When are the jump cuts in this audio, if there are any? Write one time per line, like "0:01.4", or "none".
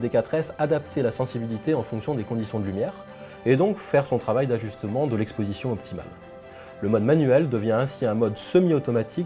0:07.3